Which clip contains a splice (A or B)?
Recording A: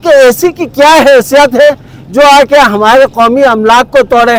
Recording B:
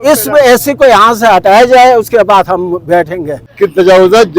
B